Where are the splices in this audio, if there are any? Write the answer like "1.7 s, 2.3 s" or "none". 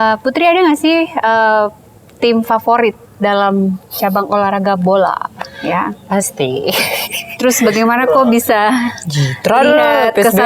none